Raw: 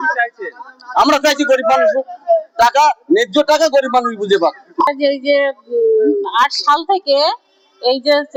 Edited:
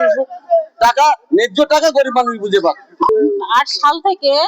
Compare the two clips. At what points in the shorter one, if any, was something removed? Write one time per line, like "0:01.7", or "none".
0:03.1

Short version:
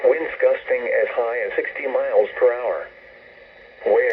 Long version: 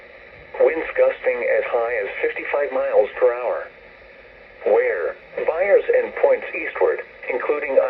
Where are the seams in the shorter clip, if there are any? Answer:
0:01.9

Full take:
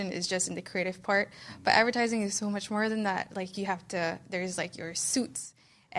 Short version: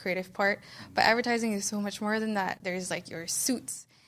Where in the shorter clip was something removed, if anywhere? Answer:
0:02.6

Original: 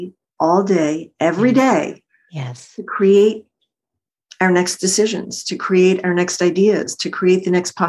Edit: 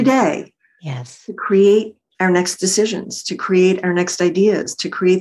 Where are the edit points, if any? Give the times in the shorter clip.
0:02.0

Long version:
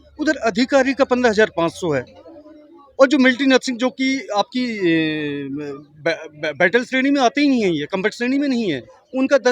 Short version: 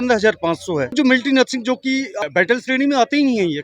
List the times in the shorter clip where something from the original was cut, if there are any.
0:00.9
0:02.1

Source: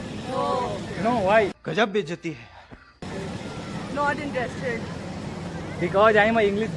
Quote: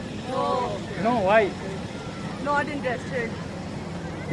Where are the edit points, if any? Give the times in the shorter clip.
0:01.6

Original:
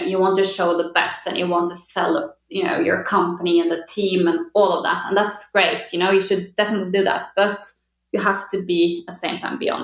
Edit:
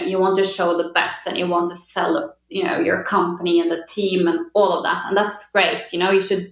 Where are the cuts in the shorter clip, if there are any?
none

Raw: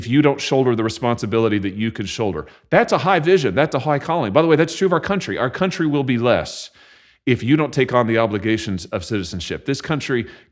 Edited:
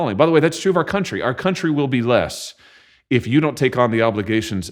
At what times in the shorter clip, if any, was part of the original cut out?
none

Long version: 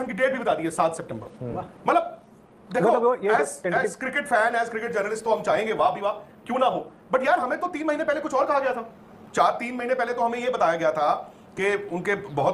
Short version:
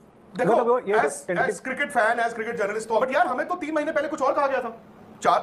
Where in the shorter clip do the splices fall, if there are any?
0:03.0

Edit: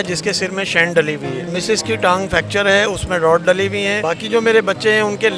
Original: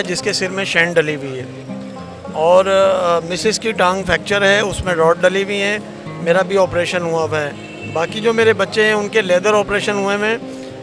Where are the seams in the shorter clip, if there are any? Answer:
0:01.5
0:04.0

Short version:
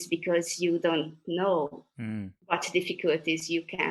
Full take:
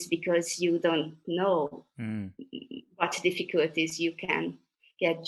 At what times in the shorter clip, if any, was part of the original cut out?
0:02.3

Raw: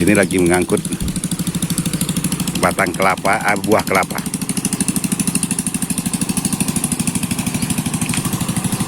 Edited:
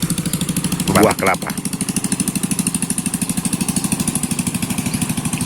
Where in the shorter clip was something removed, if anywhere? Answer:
0:00.9

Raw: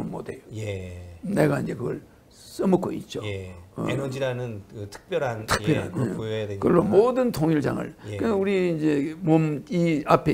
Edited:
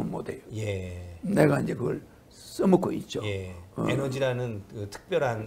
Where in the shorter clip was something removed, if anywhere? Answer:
none

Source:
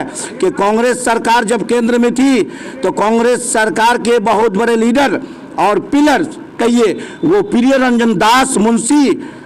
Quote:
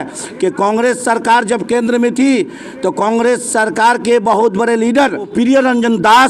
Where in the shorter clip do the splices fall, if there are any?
0:05.3

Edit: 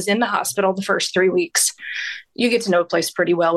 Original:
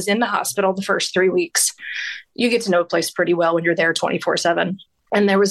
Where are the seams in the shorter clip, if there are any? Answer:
none

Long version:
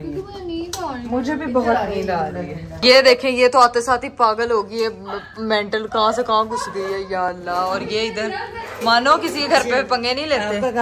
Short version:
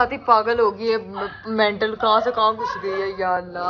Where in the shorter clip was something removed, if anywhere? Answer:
none

